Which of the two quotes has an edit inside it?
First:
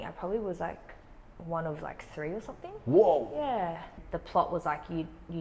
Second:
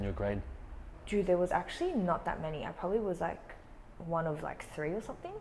first; 1 cut; at 4.0 s

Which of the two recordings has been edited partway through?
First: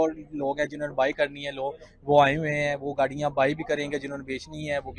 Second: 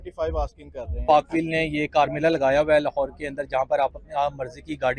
second; 1 cut; at 1.0 s

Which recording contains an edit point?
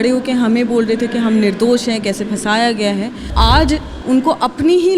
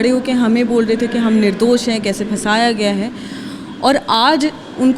first; 1 cut; at 3.3 s

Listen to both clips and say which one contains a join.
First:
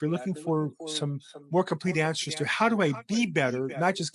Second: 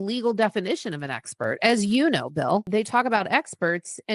second; 1 cut; at 2.7 s

